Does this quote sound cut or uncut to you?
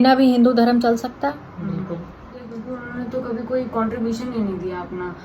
cut